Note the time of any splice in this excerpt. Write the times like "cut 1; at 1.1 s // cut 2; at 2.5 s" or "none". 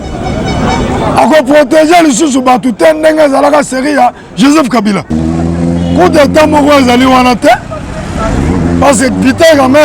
cut 1; at 5.1 s